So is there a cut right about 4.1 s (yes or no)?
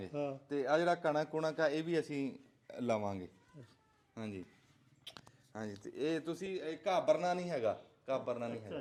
no